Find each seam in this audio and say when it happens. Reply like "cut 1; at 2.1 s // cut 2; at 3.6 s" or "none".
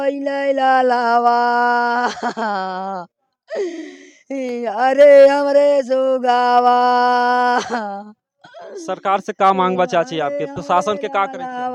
none